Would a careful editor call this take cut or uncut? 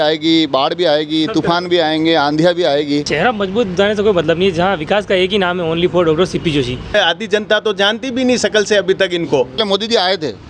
cut